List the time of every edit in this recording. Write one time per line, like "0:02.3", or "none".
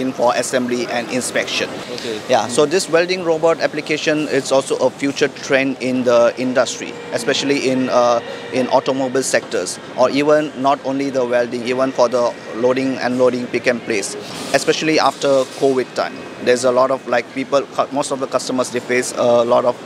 0:01.8
0:14.3

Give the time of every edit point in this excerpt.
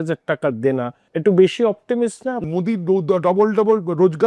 0:01.0
0:02.4

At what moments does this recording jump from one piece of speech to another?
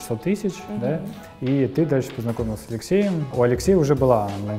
0:03.3

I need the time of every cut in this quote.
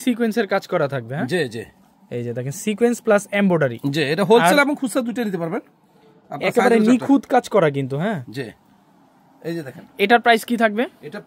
none

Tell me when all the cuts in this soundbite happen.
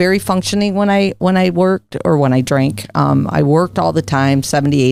none

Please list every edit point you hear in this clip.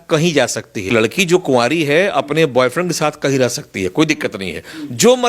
0:00.9

